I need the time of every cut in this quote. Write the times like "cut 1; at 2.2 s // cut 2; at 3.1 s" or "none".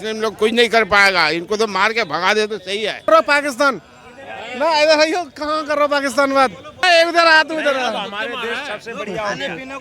cut 1; at 3.1 s // cut 2; at 6.8 s